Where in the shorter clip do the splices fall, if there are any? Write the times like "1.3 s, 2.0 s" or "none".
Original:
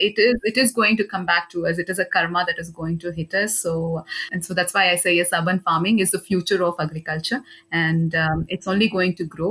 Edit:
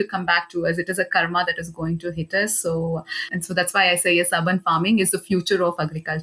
none